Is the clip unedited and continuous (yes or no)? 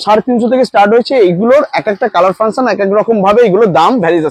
yes